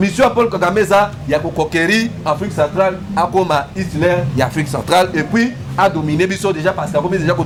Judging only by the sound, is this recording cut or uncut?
uncut